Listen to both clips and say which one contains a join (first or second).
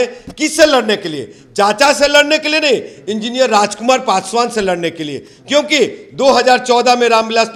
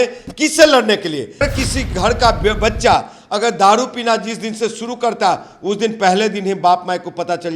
second